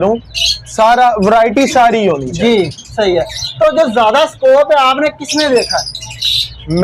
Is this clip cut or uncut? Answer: uncut